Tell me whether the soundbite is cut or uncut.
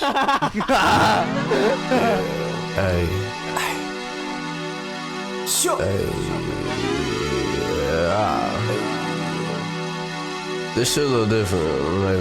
cut